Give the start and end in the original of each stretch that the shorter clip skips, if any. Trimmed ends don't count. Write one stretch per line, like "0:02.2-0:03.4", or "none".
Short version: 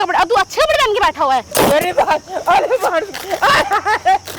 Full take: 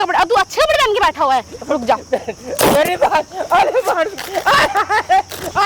0:01.5-0:02.5